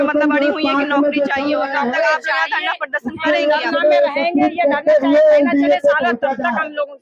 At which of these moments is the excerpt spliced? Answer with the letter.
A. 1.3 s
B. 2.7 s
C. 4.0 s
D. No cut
D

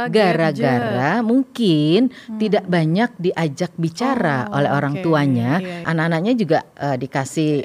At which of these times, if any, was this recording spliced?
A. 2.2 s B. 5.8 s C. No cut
B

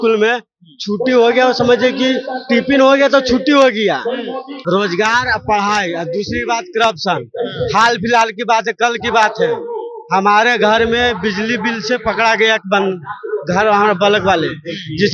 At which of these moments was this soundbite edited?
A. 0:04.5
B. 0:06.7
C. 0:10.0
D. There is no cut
A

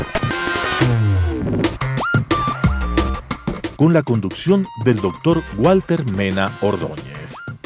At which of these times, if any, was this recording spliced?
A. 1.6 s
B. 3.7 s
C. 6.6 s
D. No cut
A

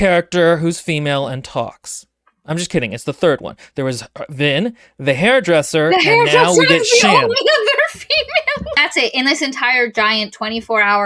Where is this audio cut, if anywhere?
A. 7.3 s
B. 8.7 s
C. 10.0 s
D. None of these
B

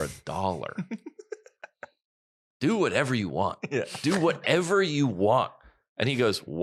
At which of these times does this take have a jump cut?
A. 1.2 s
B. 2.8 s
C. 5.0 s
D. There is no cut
D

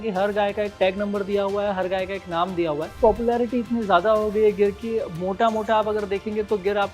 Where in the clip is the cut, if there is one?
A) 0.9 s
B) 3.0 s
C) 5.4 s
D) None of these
B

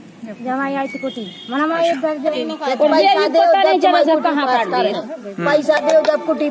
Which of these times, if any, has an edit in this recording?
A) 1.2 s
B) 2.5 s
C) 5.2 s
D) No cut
B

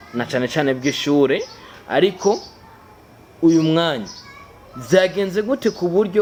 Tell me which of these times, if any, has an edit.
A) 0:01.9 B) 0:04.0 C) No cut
C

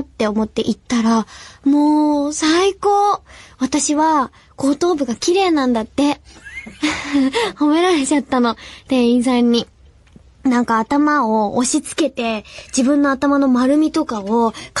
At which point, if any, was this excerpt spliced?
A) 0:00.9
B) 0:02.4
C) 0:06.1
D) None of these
B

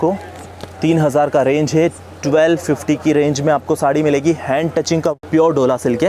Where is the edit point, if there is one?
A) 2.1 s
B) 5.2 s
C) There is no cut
B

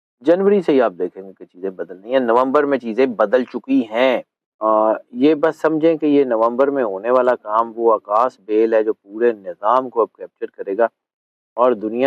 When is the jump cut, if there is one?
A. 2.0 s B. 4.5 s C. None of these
B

